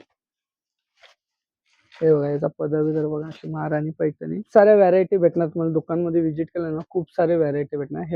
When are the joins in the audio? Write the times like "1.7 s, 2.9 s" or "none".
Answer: 4.5 s